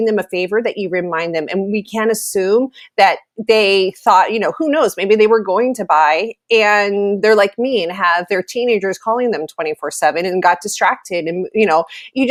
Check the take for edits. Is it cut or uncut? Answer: uncut